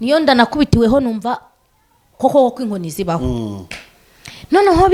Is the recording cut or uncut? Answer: uncut